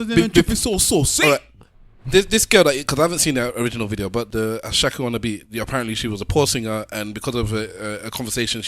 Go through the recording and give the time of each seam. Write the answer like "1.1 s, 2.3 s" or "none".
4.3 s